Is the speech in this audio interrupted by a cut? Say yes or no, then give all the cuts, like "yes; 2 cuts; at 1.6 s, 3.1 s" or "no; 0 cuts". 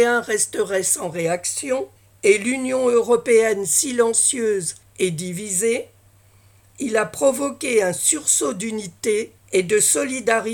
yes; 3 cuts; at 2.0 s, 4.8 s, 9.4 s